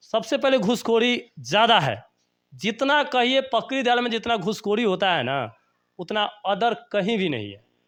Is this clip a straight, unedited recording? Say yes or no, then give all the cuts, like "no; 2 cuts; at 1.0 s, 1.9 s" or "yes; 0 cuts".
yes; 0 cuts